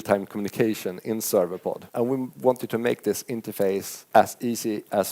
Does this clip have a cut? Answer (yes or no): yes